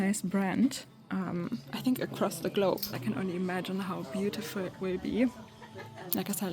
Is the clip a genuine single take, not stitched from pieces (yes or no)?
no